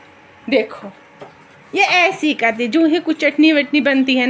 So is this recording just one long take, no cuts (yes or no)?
yes